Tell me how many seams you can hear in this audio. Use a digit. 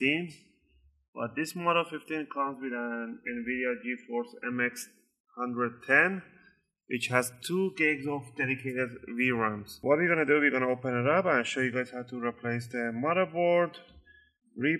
1